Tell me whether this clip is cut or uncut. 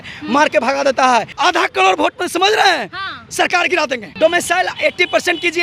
cut